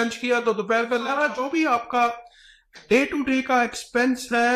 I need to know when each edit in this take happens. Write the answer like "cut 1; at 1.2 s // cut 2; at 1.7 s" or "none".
cut 1; at 1.1 s